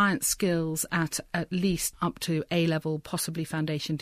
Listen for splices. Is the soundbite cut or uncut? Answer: uncut